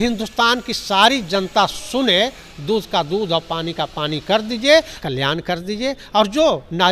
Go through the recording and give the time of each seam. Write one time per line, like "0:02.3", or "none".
0:05.0